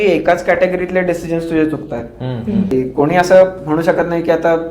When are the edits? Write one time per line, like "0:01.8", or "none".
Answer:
0:02.7